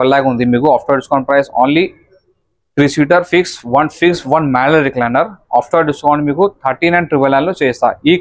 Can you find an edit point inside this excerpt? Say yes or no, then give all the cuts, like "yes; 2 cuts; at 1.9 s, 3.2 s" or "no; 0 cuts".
no; 0 cuts